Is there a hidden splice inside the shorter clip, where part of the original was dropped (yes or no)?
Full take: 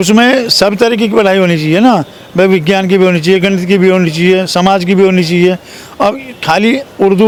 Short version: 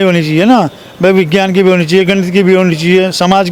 no